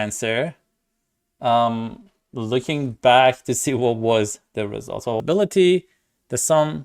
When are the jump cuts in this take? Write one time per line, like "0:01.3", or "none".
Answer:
0:05.2